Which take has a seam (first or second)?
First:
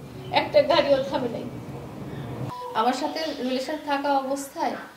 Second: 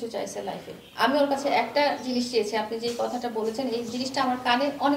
first